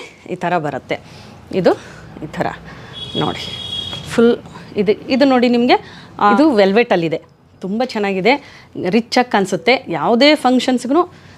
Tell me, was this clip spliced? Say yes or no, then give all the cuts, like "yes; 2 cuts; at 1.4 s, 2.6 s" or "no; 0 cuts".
no; 0 cuts